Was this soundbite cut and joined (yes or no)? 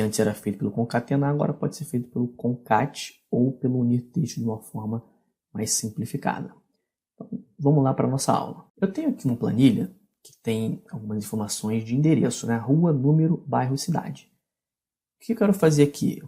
no